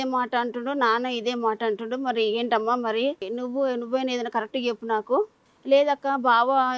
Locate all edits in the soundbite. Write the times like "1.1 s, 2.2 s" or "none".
3.3 s, 5.5 s